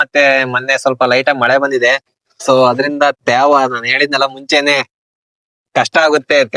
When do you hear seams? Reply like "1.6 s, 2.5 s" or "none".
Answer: none

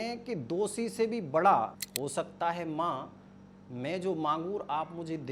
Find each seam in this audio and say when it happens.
1.8 s

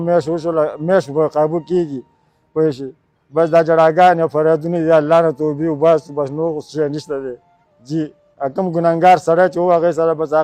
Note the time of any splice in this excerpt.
none

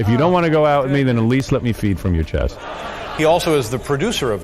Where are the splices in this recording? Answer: 2.7 s

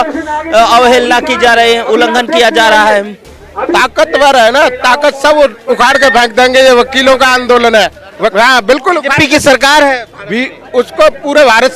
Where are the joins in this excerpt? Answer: 3.7 s, 8.3 s

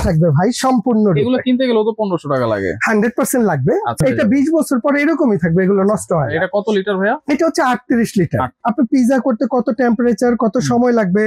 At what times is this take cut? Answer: 4.1 s, 8.5 s

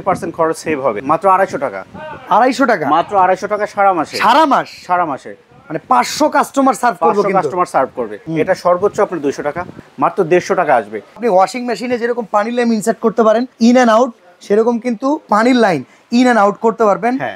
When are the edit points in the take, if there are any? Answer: 1.0 s, 8.2 s, 9.8 s, 11.2 s, 13.5 s

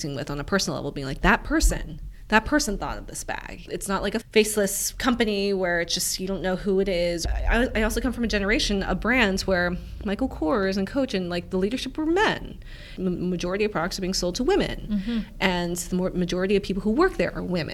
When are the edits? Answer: 4.2 s, 7.2 s, 12.9 s

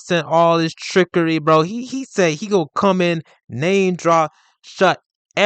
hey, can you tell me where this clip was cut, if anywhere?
none

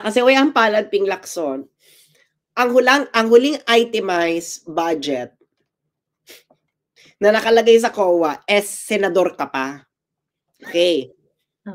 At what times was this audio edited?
none

